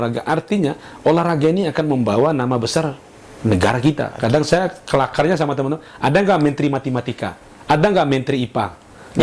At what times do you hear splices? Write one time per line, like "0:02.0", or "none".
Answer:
0:04.2